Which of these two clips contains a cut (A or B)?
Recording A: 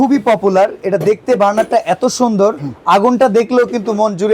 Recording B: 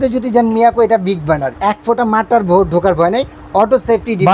B